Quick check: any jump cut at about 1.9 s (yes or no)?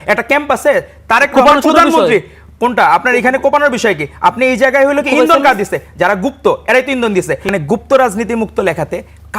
no